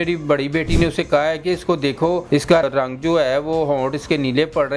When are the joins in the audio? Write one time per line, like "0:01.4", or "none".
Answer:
0:02.5